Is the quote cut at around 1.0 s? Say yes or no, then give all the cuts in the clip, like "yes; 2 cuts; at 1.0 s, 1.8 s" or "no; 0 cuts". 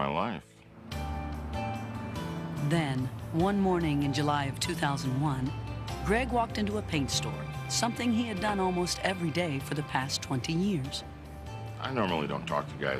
yes; 1 cut; at 1.0 s